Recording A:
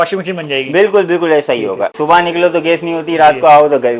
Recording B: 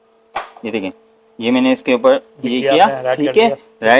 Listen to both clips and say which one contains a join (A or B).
A